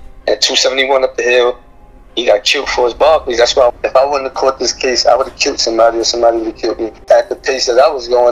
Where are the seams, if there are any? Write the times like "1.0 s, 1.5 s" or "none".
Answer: 3.8 s, 7.0 s